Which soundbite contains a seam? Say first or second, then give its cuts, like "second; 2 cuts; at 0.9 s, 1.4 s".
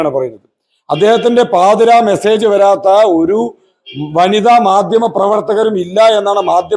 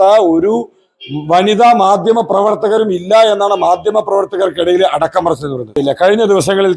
second; 1 cut; at 5.7 s